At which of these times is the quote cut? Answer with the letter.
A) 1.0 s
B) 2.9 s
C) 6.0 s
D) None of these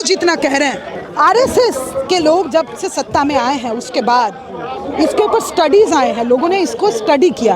A